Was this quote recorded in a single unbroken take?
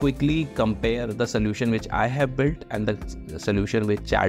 yes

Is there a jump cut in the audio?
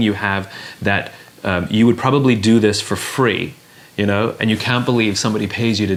no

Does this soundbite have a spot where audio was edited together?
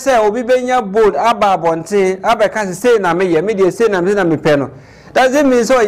no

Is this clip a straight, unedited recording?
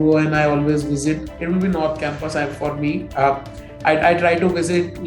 no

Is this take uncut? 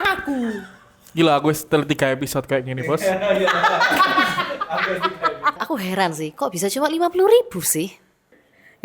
yes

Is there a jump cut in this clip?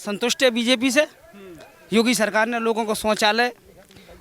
no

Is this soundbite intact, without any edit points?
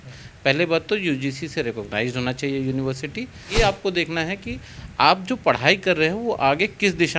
no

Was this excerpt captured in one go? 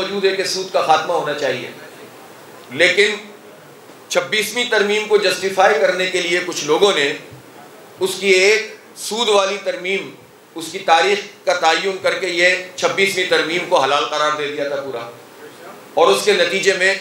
yes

